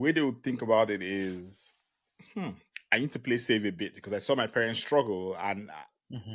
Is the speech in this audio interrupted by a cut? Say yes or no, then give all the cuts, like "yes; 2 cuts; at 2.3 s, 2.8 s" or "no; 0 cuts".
no; 0 cuts